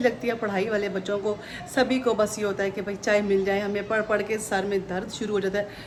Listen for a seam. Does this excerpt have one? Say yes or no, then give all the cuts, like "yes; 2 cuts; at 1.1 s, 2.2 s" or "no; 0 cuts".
no; 0 cuts